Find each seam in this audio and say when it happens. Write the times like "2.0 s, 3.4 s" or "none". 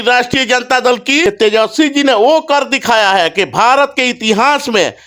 1.3 s